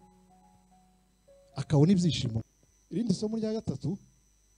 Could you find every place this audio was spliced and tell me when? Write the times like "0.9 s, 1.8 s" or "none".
2.3 s